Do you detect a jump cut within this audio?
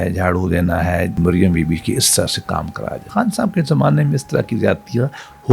yes; 2 cuts; at 1.1 s, 3.0 s

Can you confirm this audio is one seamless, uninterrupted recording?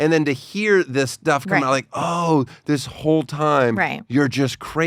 yes; 0 cuts

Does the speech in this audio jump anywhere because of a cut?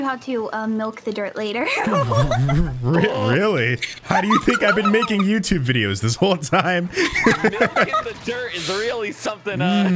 no; 0 cuts

